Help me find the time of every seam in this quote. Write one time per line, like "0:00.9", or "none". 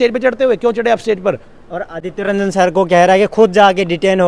none

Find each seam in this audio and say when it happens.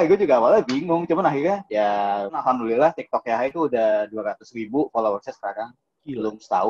0:01.9

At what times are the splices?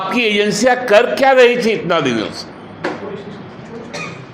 none

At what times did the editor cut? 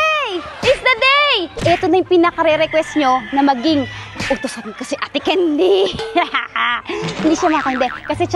0:01.6
0:07.2

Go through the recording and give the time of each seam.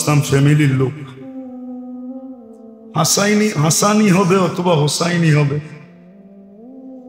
0:01.2
0:02.9
0:06.2

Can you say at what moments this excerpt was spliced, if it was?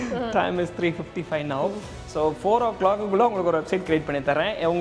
none

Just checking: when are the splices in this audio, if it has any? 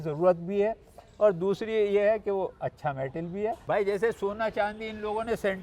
0:03.6

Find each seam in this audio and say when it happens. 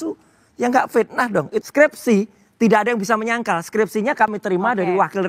0:01.7

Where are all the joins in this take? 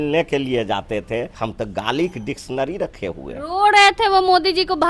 0:01.4

